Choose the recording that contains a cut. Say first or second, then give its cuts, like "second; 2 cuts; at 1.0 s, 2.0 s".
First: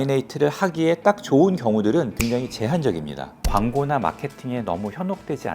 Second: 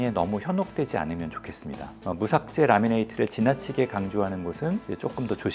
first; 2 cuts; at 2.1 s, 3.3 s